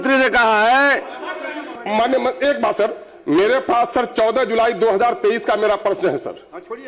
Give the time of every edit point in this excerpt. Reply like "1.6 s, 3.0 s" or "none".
1.8 s